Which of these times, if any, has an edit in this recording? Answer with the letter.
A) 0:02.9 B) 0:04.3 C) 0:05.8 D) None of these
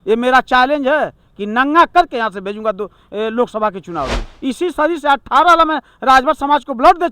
B